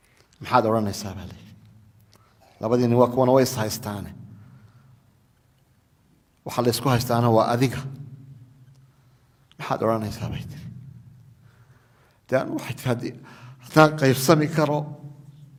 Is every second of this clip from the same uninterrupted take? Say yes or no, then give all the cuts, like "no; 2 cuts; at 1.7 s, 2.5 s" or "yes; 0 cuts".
yes; 0 cuts